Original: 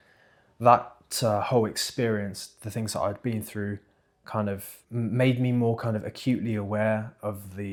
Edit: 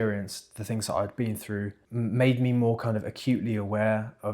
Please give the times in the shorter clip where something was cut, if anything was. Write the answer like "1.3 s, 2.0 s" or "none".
1.8 s